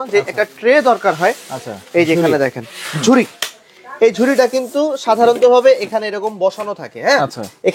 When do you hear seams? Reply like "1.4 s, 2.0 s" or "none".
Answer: none

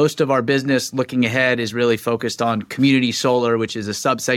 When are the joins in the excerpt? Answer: none

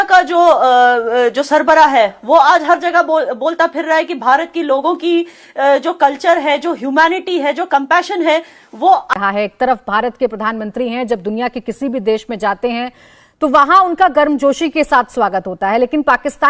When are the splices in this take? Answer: 9.1 s

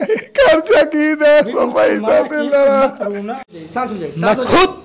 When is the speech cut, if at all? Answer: 3.6 s

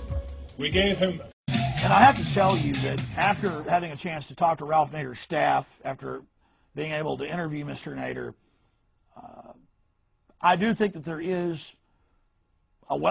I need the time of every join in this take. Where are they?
none

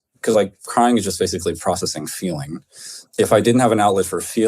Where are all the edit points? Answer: 3.0 s

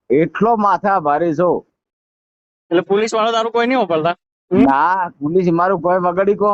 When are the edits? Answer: none

